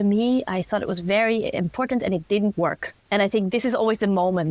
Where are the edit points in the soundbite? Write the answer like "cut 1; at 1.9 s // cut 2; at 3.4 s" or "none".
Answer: cut 1; at 2.9 s